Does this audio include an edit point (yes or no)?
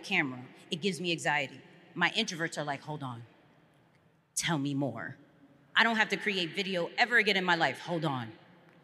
no